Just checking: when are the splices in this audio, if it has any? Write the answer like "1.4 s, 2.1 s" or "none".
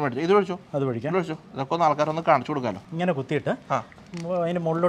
2.8 s